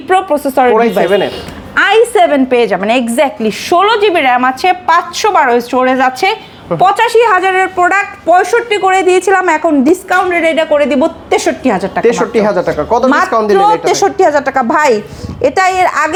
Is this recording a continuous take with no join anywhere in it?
yes; 0 cuts

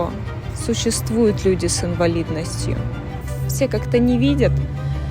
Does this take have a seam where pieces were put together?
yes; 1 cut; at 3.3 s

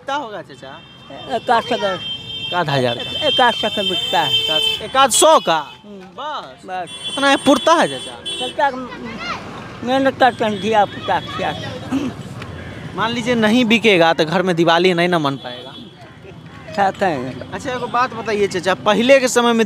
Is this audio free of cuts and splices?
yes; 0 cuts

